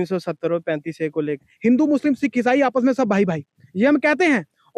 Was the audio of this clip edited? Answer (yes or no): yes